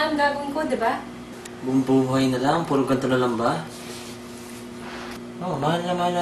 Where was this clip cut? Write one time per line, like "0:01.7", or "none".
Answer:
0:05.2